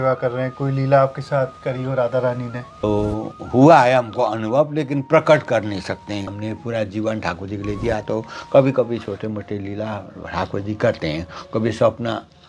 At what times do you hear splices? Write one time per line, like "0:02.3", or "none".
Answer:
0:02.7
0:06.3